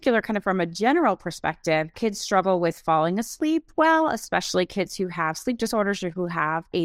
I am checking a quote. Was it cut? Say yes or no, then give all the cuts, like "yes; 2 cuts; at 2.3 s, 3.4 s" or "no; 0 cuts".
yes; 1 cut; at 2.0 s